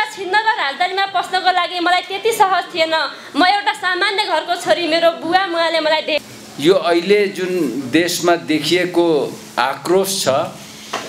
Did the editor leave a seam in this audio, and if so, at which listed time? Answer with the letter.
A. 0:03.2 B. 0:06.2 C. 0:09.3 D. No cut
B